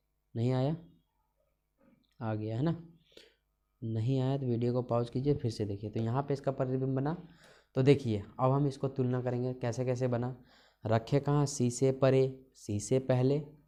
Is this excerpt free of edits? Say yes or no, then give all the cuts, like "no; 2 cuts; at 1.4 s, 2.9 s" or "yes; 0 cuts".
yes; 0 cuts